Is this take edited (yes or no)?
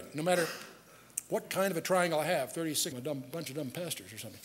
no